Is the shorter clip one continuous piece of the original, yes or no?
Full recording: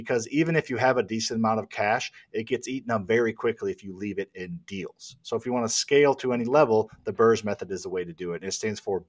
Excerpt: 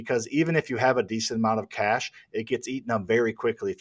yes